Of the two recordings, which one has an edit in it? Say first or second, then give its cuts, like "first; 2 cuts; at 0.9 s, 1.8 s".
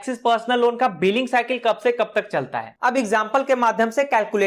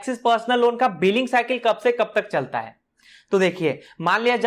first; 1 cut; at 2.7 s